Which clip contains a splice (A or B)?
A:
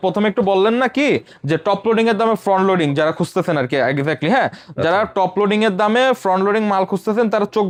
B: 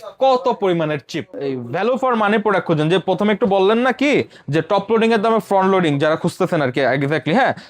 B